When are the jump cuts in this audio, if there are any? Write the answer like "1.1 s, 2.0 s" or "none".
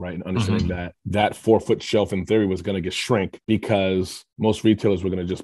0.9 s